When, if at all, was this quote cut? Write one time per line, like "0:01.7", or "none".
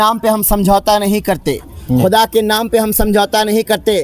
none